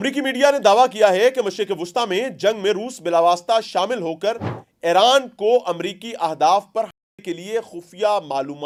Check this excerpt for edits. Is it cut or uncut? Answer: uncut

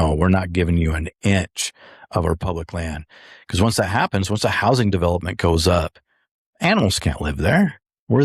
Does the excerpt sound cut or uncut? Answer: uncut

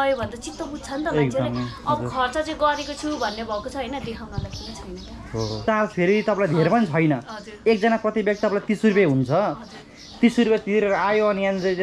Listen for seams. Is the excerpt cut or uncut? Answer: cut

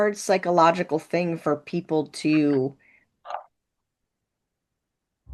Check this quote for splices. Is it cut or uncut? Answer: uncut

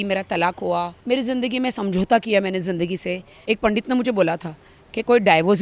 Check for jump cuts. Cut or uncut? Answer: cut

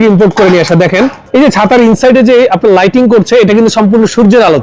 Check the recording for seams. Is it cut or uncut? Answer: cut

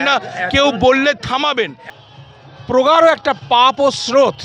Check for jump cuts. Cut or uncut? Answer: cut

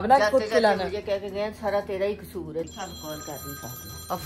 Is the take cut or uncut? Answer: cut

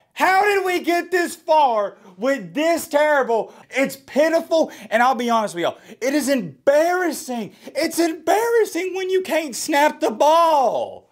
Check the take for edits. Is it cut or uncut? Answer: cut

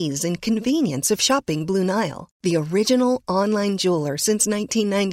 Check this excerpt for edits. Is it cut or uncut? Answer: uncut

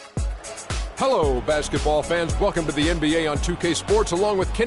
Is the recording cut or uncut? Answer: cut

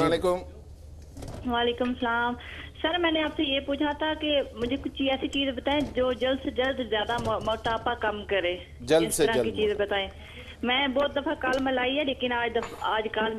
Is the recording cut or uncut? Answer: uncut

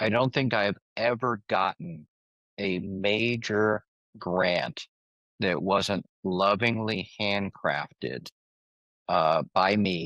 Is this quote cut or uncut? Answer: uncut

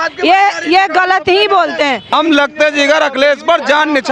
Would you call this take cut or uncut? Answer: cut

